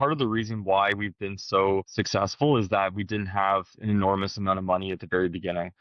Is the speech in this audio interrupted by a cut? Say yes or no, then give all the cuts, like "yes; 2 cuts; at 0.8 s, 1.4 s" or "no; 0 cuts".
yes; 1 cut; at 1.9 s